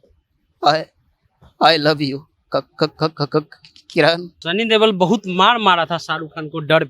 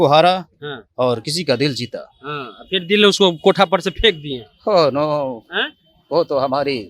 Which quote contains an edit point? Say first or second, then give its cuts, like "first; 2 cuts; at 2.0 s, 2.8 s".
first; 1 cut; at 4.3 s